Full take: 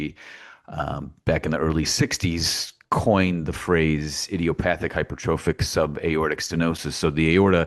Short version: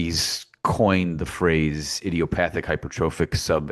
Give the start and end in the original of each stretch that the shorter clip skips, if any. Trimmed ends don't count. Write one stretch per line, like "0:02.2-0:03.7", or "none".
none